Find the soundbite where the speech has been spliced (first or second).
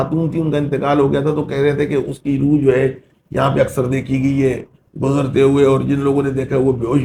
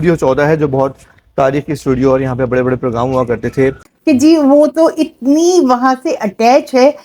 second